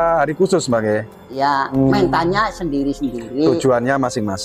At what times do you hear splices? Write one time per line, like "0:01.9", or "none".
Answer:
0:01.8